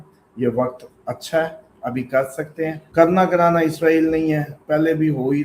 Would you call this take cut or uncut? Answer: cut